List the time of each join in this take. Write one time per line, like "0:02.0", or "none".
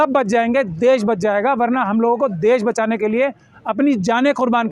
none